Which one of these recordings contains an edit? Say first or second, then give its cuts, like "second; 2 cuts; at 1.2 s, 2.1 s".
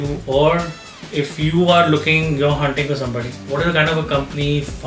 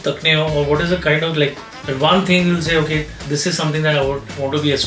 first; 1 cut; at 3.4 s